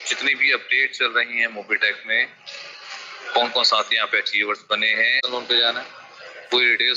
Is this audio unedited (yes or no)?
no